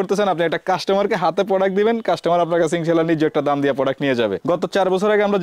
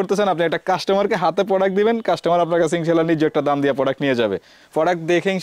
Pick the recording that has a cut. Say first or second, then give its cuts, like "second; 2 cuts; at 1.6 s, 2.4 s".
first; 1 cut; at 4.4 s